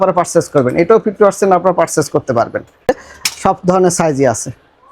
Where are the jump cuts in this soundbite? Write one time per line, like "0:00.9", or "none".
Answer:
0:02.9